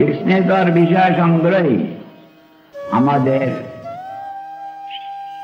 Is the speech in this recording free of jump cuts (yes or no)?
no